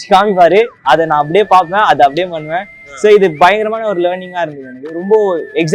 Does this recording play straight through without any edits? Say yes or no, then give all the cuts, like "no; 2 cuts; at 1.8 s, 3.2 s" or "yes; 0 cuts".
yes; 0 cuts